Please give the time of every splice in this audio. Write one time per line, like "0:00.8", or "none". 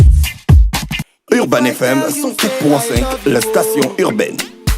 0:01.1